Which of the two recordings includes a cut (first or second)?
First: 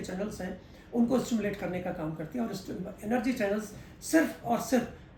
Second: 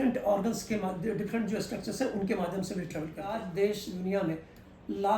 second